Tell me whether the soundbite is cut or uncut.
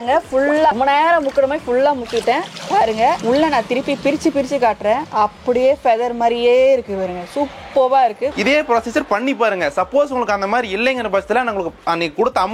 cut